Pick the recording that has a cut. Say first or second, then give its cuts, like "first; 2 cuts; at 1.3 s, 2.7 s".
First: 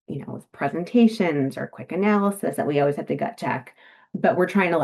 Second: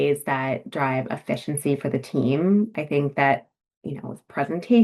second; 1 cut; at 2.8 s